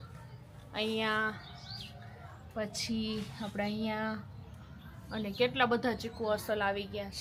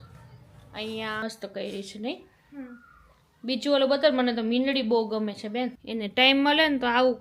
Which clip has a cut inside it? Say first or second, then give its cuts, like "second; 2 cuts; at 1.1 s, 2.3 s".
second; 2 cuts; at 1.2 s, 5.8 s